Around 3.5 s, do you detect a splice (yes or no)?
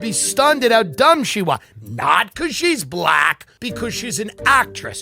yes